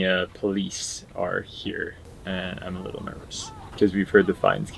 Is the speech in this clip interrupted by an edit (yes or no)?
yes